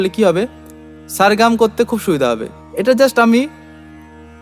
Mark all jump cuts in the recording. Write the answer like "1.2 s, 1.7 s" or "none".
2.5 s